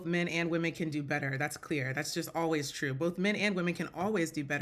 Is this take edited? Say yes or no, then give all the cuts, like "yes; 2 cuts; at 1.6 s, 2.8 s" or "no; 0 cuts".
no; 0 cuts